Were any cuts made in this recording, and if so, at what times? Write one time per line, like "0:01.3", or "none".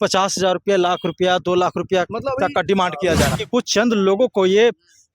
0:03.4